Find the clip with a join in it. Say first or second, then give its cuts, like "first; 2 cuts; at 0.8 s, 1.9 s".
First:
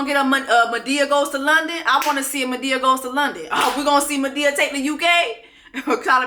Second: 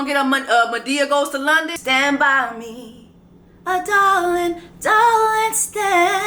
second; 1 cut; at 1.7 s